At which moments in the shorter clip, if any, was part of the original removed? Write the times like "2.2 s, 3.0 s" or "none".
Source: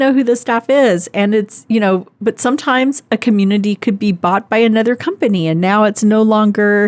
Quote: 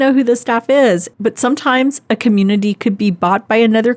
1.1 s